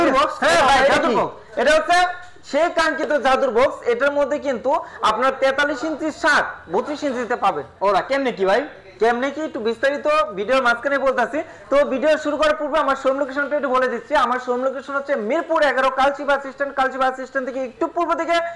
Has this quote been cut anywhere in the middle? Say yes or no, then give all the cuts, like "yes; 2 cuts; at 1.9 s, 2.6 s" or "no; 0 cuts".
no; 0 cuts